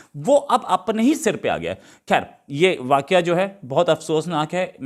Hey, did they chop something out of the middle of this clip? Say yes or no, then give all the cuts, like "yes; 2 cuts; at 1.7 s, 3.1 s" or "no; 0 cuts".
no; 0 cuts